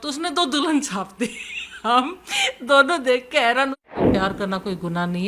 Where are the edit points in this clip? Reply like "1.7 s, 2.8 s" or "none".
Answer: 4.0 s